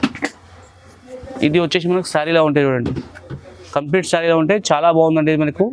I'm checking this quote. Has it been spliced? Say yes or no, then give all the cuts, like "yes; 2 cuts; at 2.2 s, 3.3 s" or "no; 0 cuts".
no; 0 cuts